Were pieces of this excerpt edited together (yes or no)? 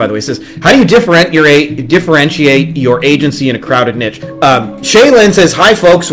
yes